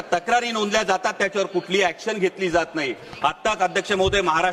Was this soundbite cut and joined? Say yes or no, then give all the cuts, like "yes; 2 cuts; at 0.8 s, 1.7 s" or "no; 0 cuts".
no; 0 cuts